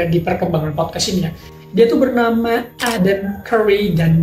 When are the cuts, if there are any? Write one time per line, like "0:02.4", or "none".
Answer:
none